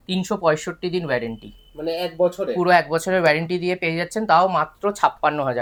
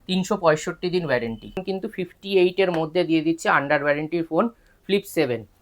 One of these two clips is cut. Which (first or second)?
second